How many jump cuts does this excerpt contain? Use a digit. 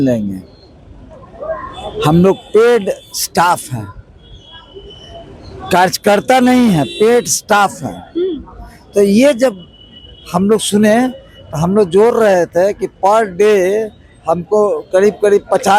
0